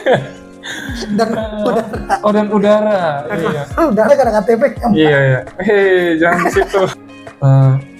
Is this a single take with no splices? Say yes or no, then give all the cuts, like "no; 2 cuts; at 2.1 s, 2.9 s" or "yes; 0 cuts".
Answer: no; 1 cut; at 6.9 s